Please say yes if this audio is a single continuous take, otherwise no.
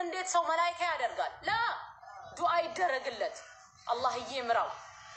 yes